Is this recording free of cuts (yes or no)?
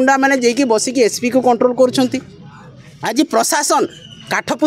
yes